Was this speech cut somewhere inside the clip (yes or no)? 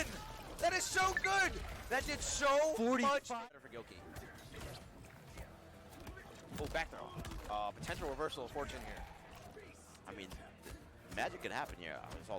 yes